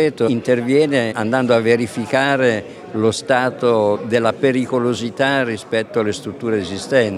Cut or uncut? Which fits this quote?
cut